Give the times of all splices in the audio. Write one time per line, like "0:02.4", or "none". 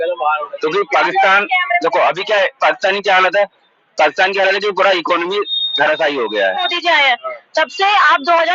0:06.7